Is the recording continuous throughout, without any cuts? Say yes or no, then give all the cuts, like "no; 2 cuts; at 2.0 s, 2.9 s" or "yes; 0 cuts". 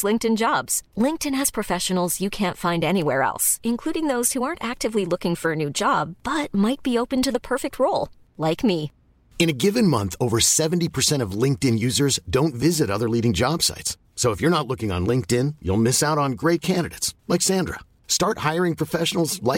yes; 0 cuts